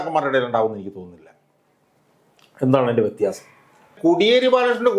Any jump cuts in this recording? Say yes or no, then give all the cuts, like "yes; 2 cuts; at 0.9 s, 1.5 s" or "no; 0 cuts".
yes; 1 cut; at 4.0 s